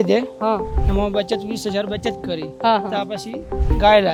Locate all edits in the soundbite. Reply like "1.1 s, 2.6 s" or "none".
none